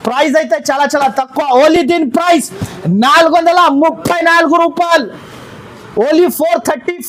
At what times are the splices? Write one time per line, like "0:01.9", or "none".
none